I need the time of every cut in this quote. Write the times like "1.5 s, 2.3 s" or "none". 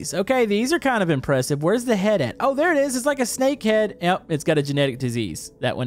none